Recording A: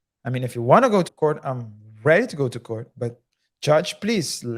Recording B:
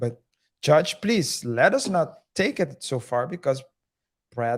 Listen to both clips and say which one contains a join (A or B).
A